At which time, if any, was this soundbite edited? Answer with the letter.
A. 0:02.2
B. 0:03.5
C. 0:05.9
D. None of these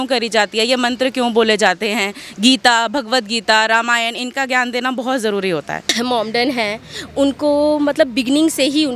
C